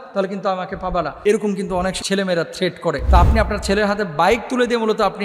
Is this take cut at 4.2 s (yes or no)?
no